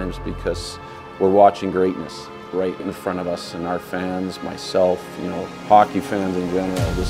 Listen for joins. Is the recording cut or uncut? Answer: uncut